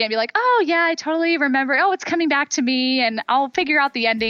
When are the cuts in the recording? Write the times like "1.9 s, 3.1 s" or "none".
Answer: none